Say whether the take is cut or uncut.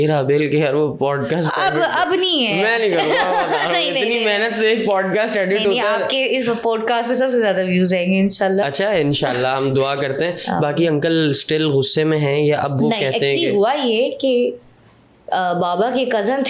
uncut